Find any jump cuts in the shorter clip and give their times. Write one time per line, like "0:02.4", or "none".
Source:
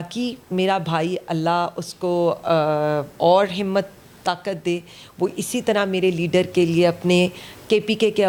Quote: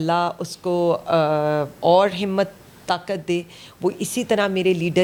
none

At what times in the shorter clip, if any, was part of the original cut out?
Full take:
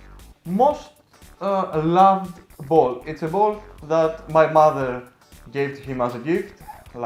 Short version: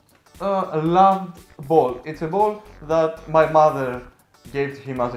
none

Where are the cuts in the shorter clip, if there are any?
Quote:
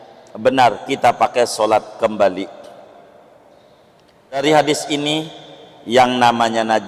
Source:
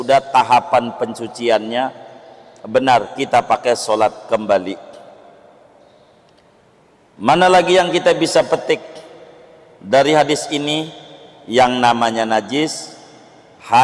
0:04.4

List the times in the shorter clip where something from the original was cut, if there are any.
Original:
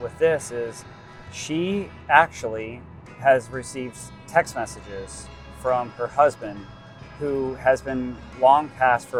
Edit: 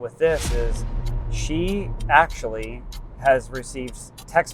none

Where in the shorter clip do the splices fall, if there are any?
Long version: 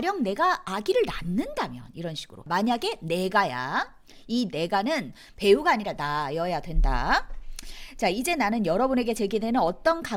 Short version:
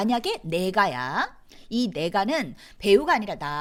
none

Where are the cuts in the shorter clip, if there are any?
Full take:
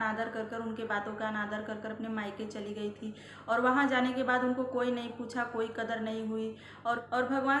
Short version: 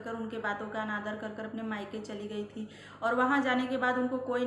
none

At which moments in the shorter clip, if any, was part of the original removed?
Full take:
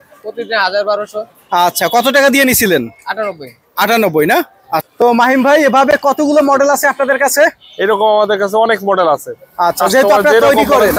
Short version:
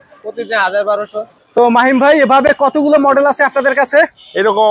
0:01.4

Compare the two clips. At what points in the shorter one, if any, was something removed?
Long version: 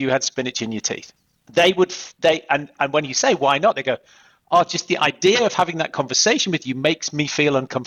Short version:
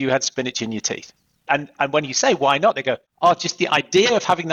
0:01.4
0:03.1

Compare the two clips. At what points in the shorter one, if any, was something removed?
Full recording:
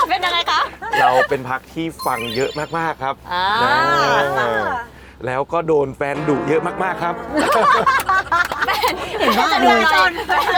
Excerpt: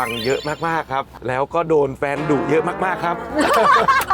0:01.1

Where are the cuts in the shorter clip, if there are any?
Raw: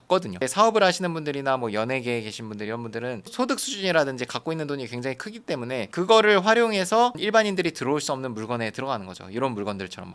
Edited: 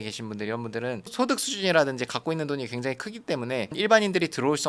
0:03.7

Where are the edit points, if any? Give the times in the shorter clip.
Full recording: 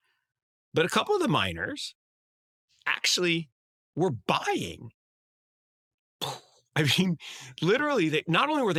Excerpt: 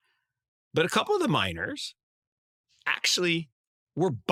none

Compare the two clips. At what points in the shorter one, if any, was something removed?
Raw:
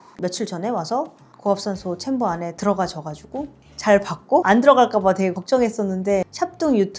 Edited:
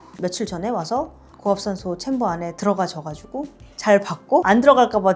none

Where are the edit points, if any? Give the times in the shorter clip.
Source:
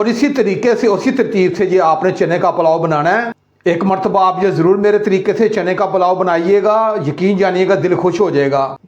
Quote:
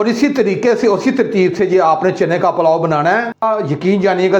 0:03.4

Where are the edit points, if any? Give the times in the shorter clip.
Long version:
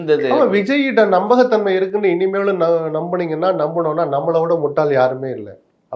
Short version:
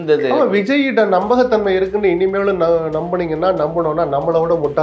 none

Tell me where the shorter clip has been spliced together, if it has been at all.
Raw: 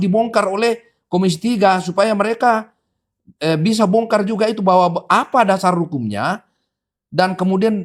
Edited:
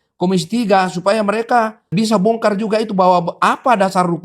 0:01.9

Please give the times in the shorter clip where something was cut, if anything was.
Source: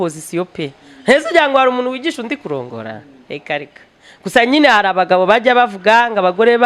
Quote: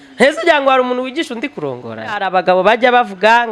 0:02.2

